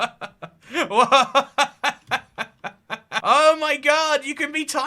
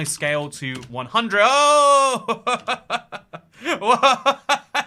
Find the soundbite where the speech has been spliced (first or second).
first